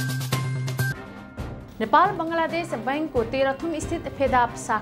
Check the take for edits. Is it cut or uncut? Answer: cut